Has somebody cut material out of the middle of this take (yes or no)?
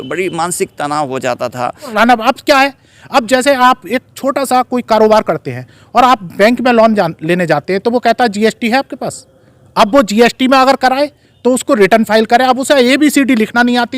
yes